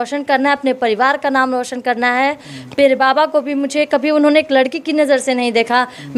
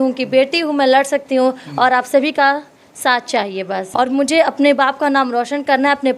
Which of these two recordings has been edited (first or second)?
second